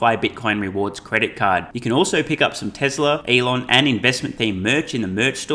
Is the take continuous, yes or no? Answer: no